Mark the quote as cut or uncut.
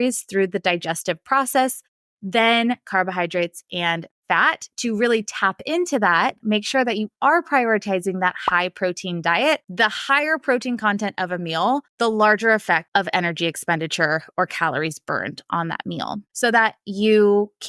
cut